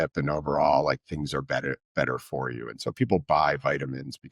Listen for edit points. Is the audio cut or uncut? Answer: uncut